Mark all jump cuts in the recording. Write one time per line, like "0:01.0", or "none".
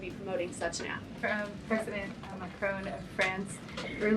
0:01.2